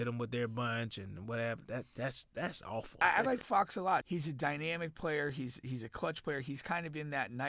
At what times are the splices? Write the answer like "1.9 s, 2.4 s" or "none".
3.0 s, 4.0 s